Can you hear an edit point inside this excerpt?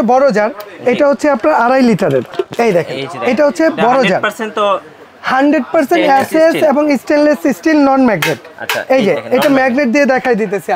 yes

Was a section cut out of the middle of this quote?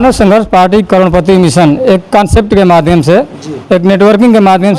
no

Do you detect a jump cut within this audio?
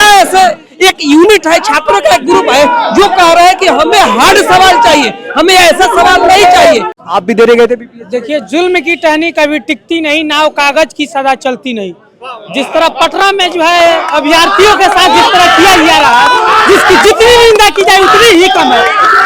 yes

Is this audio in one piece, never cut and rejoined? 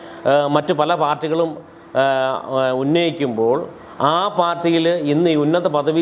yes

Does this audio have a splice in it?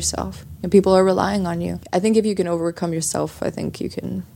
yes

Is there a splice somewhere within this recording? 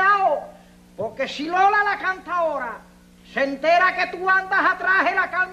yes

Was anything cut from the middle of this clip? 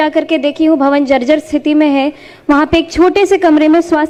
no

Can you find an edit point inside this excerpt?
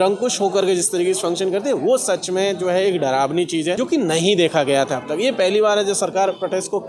yes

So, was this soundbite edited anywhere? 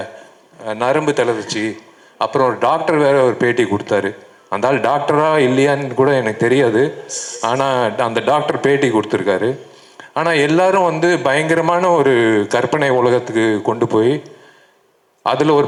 no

